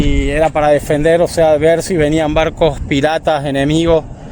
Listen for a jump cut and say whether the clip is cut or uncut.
uncut